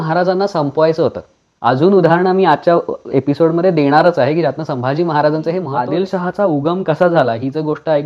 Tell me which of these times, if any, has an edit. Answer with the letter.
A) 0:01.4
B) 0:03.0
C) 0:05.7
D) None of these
C